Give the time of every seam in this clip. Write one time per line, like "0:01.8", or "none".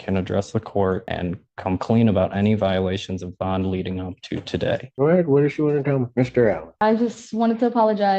0:01.5